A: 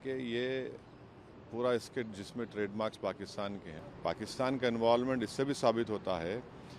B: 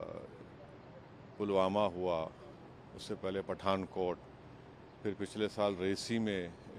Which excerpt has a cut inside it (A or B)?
A